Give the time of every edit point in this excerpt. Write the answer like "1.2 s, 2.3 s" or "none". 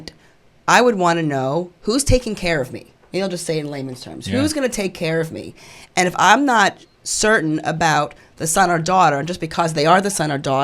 1.7 s